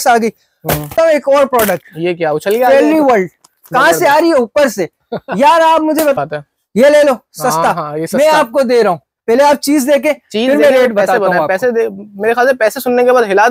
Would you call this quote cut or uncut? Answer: cut